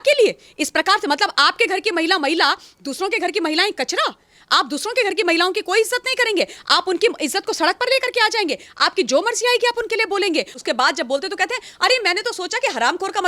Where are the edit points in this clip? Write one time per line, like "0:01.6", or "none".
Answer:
0:10.6